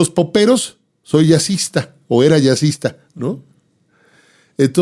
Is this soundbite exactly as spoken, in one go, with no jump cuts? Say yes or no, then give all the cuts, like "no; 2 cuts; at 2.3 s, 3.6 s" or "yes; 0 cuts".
yes; 0 cuts